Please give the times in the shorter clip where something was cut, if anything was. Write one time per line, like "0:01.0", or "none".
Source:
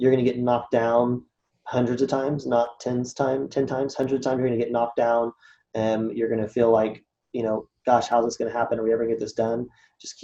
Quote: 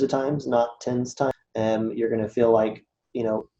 0:01.3